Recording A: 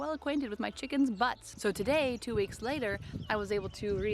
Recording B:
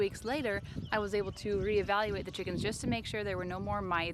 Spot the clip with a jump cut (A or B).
A